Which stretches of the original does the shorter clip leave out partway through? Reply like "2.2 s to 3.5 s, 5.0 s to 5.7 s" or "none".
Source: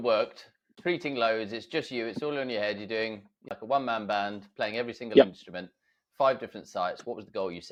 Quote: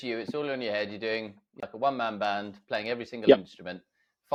none